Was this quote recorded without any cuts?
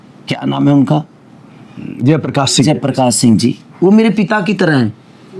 yes; 0 cuts

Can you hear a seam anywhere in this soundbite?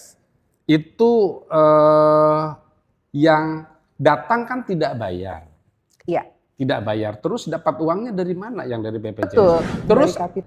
yes; 1 cut; at 9.3 s

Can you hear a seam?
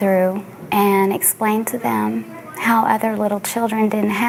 no; 0 cuts

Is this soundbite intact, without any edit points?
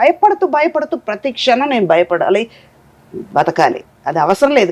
yes; 0 cuts

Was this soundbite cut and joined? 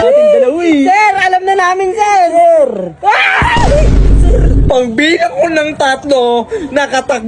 yes; 1 cut; at 4.6 s

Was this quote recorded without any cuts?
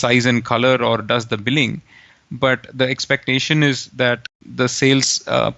no; 1 cut; at 4.4 s

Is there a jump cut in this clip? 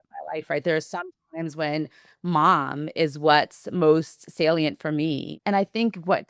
yes; 1 cut; at 5.3 s

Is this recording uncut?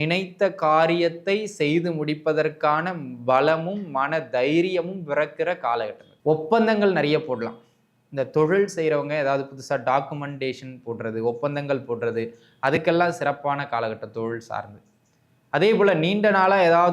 no; 1 cut; at 6.0 s

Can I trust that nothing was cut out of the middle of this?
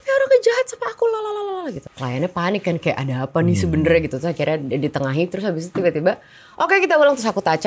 no; 1 cut; at 1.9 s

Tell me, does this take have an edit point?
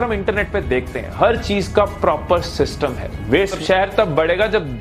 yes; 1 cut; at 3.6 s

